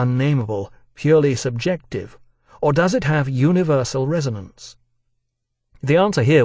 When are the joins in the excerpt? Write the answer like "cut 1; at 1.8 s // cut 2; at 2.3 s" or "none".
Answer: cut 1; at 3.3 s